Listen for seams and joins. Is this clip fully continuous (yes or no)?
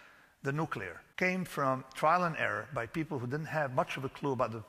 no